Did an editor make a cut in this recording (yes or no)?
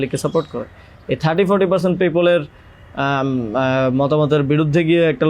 no